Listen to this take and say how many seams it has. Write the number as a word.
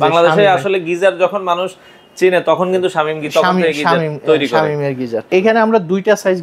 one